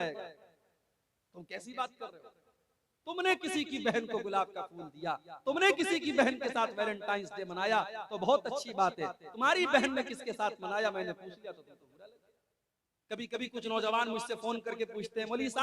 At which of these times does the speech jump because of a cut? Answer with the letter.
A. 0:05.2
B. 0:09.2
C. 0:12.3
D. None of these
C